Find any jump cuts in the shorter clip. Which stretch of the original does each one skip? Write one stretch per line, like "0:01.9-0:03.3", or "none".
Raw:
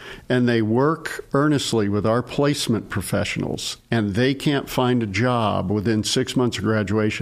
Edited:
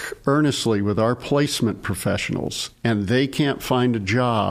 none